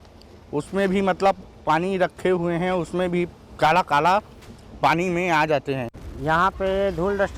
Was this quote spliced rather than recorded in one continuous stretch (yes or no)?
yes